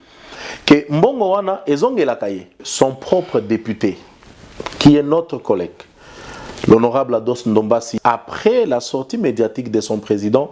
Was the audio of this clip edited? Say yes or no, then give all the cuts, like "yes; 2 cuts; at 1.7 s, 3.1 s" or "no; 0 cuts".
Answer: yes; 2 cuts; at 2.6 s, 7.9 s